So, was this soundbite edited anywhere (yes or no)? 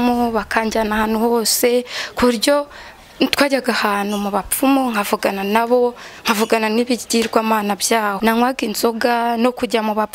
yes